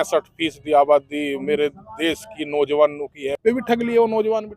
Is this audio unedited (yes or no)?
no